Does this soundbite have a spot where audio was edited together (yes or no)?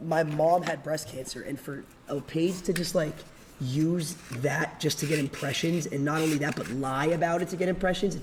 no